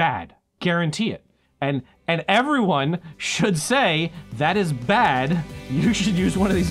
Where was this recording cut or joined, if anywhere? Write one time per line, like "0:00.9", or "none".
0:01.6